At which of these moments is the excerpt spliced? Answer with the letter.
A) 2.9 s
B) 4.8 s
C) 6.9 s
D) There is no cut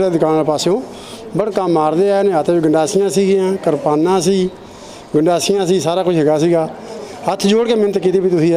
C